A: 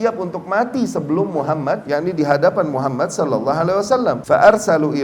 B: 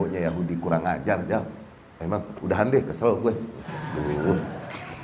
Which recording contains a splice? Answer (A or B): A